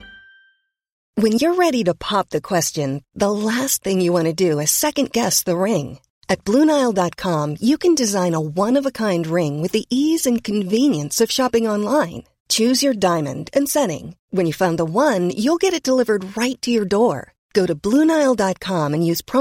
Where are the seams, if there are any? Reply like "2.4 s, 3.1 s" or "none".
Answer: 1.0 s